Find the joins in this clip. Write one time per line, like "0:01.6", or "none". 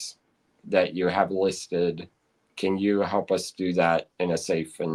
none